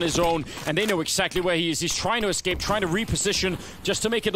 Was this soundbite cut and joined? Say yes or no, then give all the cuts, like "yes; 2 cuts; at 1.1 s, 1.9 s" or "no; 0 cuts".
no; 0 cuts